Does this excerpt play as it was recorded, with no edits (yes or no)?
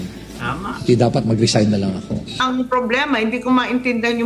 no